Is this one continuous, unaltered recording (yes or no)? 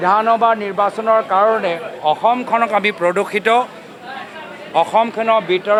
yes